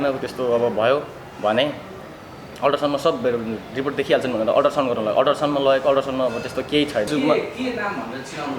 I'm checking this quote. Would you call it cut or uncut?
cut